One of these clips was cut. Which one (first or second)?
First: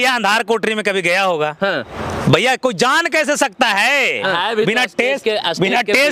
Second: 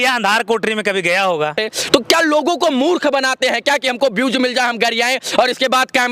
second